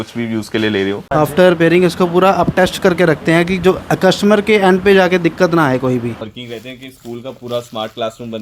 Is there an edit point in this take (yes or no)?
yes